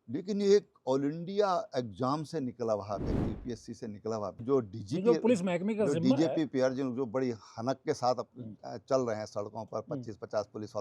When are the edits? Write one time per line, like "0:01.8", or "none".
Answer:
0:04.4